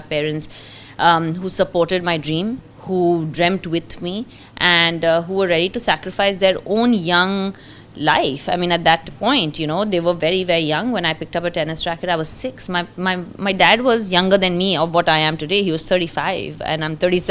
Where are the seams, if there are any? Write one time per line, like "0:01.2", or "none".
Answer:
none